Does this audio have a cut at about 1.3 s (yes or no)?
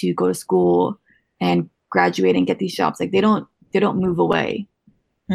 no